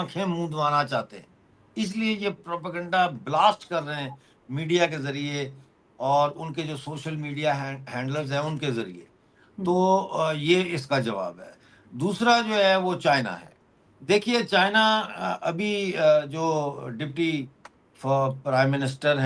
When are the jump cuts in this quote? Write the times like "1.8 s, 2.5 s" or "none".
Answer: none